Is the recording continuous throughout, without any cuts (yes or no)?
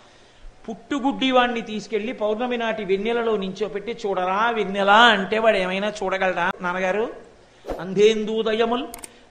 no